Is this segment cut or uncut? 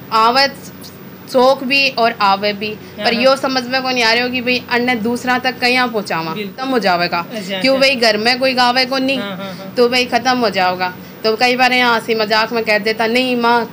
cut